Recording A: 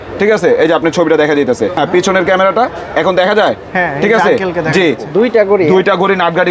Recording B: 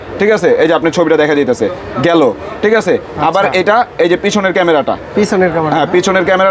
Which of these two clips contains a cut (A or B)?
A